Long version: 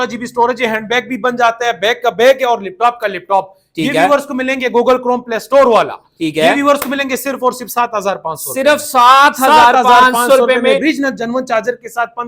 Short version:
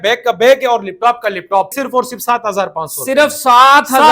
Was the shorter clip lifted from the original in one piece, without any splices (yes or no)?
no